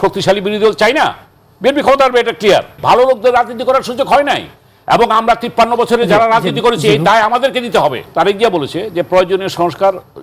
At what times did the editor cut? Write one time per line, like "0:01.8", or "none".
0:02.8
0:08.1